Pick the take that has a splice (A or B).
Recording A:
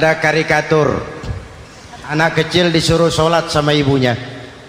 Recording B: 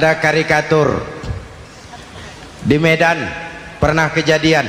A